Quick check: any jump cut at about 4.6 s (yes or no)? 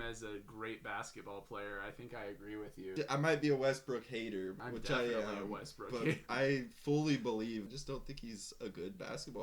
yes